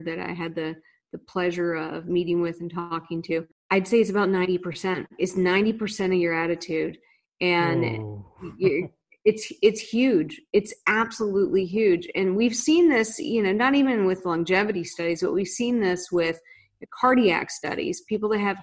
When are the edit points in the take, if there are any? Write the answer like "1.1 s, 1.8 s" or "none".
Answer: 3.5 s